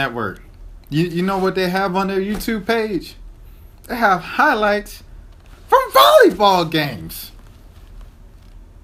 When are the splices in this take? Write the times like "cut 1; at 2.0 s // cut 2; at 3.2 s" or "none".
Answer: none

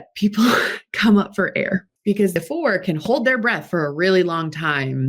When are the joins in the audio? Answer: cut 1; at 2.3 s

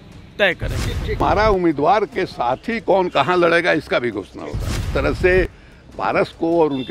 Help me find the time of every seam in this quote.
cut 1; at 1.2 s // cut 2; at 4.9 s

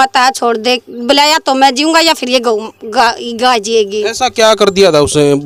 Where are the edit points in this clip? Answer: none

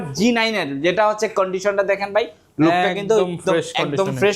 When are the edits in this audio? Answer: none

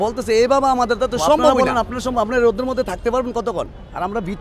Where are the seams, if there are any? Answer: cut 1; at 1.5 s

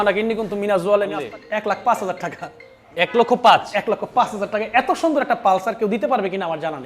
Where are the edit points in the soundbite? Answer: cut 1; at 1.2 s

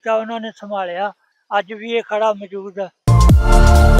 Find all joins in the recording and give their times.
cut 1; at 1.3 s // cut 2; at 2.9 s

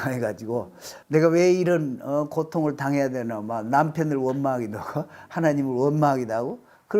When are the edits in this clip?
cut 1; at 0.9 s

